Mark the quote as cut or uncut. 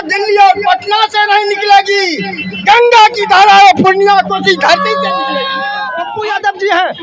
cut